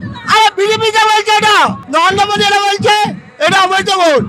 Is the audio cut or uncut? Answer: cut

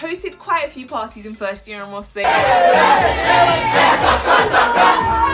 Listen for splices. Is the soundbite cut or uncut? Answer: cut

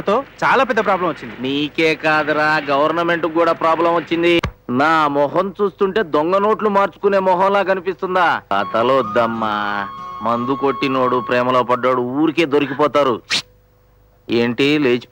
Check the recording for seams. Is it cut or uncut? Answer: cut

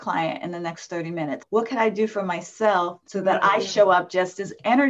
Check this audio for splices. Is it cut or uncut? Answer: uncut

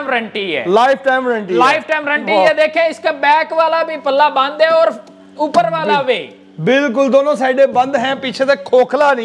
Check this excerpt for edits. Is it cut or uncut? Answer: uncut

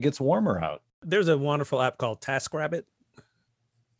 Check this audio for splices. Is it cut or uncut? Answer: cut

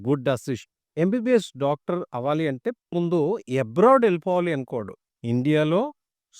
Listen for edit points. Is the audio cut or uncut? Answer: cut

